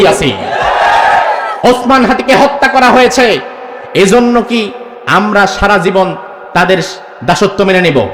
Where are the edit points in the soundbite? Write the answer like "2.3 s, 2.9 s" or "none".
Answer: 1.5 s